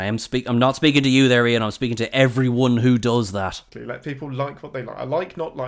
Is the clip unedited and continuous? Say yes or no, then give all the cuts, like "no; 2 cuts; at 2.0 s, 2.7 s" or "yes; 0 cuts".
no; 1 cut; at 3.7 s